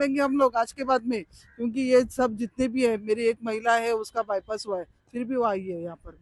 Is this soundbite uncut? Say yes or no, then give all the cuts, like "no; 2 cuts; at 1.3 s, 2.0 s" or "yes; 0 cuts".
yes; 0 cuts